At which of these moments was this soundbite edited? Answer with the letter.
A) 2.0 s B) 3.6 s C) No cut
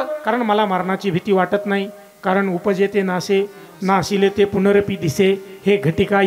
C